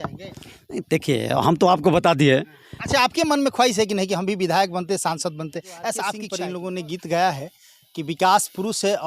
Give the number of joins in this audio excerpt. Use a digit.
1